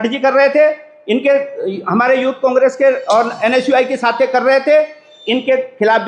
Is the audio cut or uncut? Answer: uncut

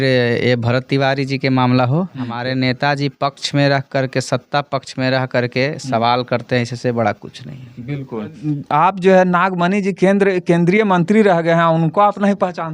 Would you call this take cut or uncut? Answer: cut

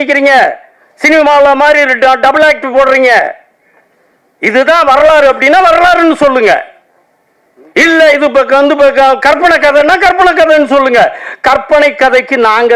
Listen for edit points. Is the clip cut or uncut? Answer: uncut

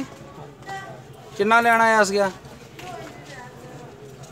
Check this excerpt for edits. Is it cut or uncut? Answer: uncut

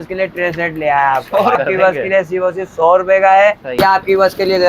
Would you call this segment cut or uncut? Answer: cut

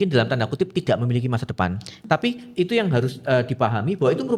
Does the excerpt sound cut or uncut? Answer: cut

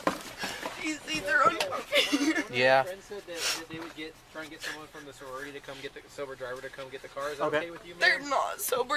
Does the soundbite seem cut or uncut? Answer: uncut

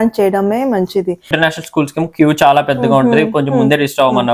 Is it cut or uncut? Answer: cut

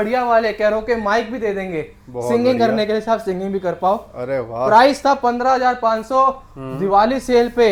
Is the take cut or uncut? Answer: uncut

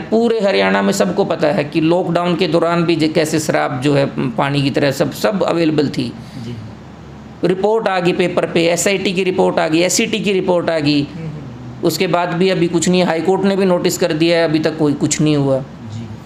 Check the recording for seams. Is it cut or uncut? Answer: uncut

